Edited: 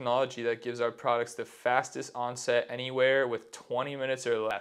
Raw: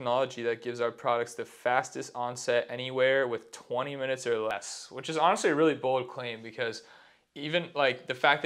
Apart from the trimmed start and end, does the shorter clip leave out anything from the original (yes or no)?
no